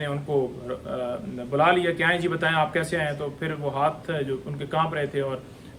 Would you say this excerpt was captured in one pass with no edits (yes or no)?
yes